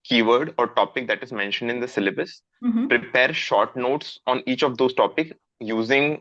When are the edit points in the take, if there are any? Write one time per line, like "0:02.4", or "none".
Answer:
none